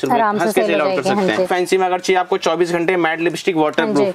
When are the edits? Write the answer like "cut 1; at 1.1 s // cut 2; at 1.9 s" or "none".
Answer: cut 1; at 1.5 s